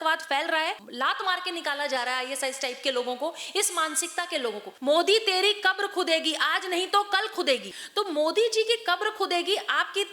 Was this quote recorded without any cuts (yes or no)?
no